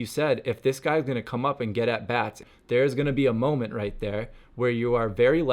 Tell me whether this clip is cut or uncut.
cut